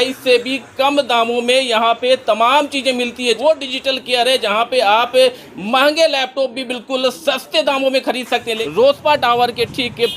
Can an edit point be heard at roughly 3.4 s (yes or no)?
yes